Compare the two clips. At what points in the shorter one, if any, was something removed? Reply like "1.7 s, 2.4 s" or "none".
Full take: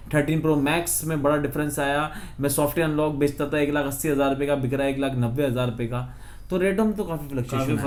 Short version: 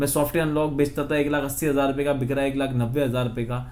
none